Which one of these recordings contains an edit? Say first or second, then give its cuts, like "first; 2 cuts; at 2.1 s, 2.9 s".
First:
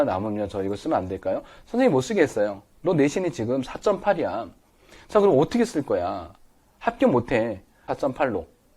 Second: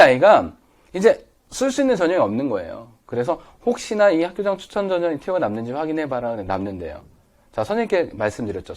first; 1 cut; at 7.8 s